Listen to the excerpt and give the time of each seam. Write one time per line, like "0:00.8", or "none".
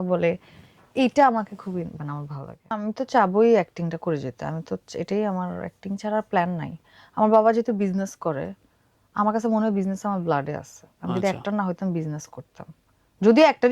0:02.8